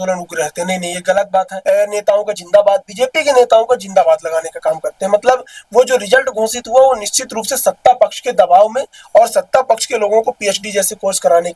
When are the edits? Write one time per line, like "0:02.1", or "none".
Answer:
0:01.5